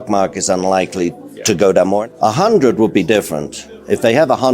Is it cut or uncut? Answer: cut